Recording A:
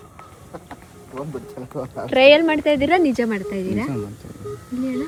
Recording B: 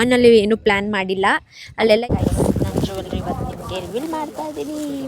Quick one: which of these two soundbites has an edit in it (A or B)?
B